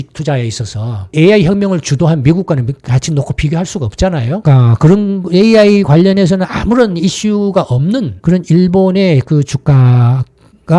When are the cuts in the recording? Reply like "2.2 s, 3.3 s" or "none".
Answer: 1.0 s